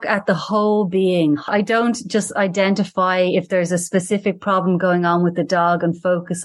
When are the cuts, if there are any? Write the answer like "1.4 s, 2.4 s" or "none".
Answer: 1.5 s